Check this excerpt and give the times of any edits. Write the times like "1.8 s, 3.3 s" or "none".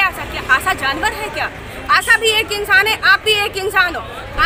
none